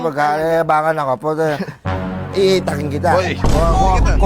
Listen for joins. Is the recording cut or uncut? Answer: uncut